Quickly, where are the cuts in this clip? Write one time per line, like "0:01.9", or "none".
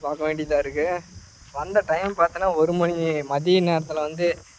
none